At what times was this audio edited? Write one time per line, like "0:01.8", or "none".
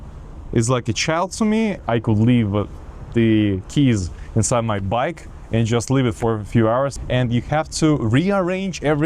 0:01.8
0:07.0